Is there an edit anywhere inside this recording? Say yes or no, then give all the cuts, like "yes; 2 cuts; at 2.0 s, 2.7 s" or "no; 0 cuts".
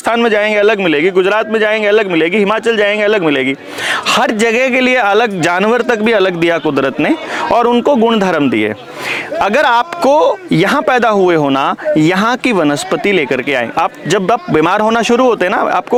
no; 0 cuts